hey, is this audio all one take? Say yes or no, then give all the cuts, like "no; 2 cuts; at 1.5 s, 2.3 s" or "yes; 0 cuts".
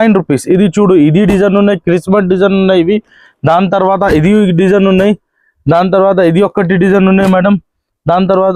yes; 0 cuts